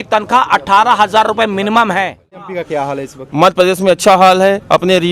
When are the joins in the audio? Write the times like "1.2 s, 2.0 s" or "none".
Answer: 2.5 s